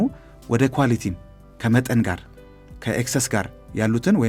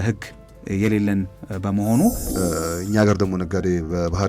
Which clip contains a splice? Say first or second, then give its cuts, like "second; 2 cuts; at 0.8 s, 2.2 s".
second; 1 cut; at 2.3 s